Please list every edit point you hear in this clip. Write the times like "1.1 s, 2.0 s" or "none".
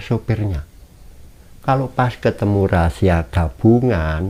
none